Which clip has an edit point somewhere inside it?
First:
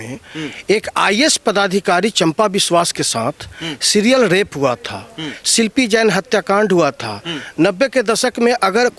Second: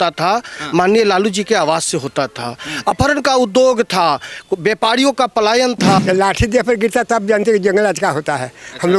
second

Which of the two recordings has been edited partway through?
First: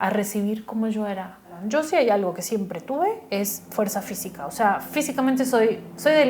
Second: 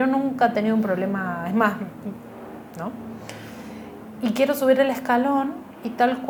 first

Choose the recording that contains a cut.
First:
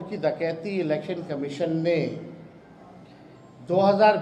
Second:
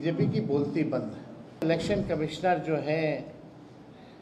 second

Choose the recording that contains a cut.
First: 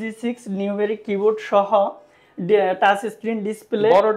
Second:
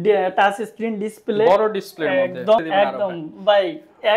second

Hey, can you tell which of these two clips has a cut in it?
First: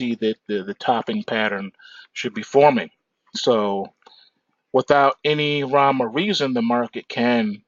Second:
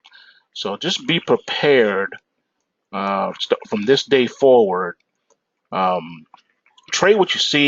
second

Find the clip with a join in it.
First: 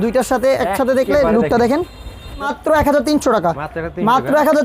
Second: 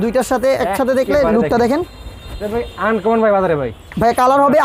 first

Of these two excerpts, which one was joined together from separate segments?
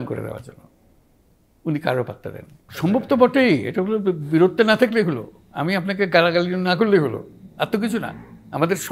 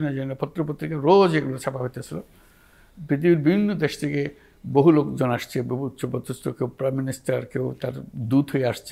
first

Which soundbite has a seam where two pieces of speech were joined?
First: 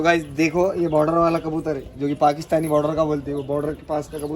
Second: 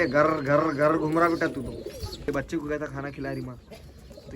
second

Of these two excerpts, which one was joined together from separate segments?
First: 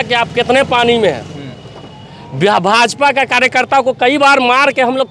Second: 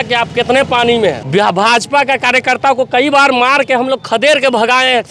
second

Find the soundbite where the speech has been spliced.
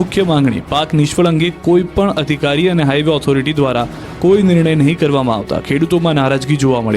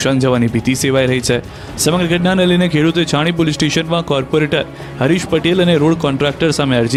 first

